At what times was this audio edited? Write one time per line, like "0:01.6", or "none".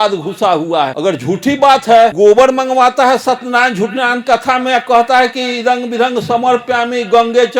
0:00.9
0:02.1